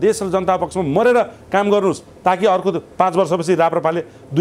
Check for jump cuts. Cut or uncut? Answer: uncut